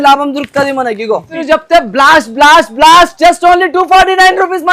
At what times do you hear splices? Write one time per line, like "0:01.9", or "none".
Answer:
0:01.4